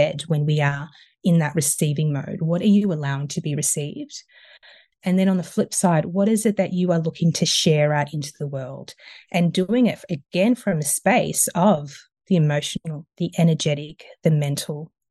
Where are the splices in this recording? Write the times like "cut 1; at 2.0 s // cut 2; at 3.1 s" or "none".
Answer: none